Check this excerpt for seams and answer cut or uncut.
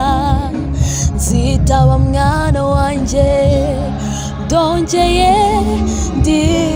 uncut